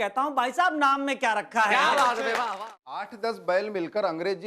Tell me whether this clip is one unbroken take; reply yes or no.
no